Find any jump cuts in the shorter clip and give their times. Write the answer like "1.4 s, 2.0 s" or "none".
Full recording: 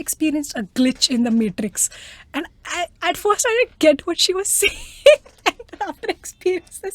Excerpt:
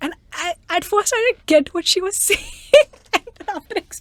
none